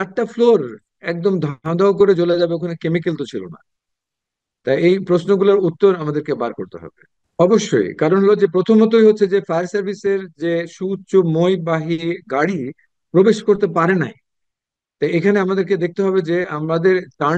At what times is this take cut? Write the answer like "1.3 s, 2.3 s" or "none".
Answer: 7.0 s